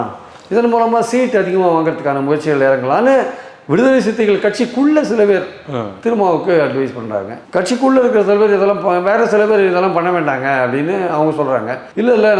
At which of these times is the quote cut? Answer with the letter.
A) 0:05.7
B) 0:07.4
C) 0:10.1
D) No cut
D